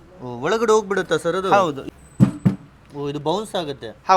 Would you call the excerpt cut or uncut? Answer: cut